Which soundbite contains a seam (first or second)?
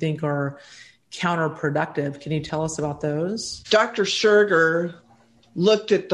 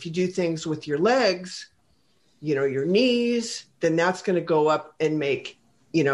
first